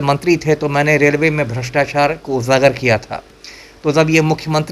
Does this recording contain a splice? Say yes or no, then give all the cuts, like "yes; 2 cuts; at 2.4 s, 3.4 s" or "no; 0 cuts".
no; 0 cuts